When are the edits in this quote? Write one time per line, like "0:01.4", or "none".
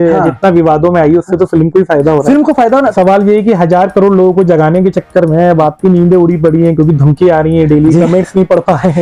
0:02.9

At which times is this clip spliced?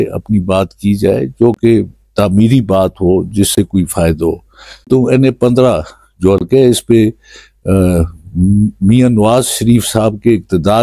0:04.9

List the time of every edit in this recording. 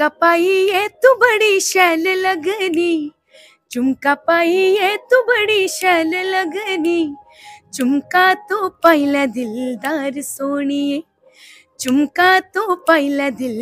none

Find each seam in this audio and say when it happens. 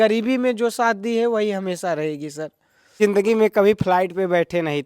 0:03.0

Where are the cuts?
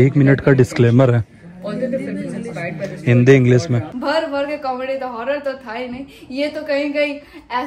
0:03.9

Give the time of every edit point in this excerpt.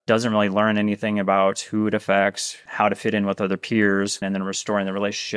0:02.5
0:04.2

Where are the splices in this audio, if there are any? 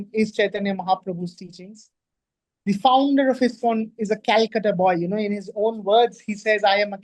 none

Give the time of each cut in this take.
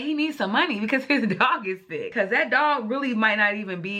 0:02.1

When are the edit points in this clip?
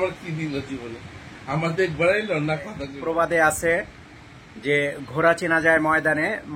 0:02.9

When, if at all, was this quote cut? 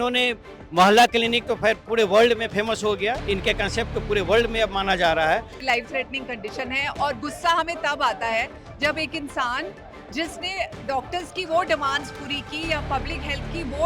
0:05.5

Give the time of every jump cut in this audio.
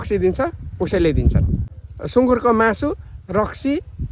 0:02.1

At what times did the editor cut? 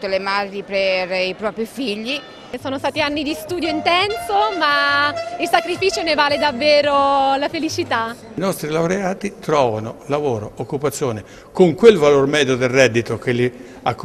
0:02.6
0:08.4

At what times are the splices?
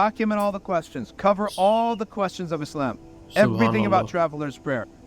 0:01.5

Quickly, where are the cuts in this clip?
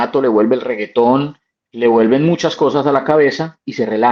none

